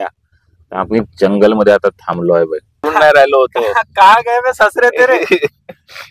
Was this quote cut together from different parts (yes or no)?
yes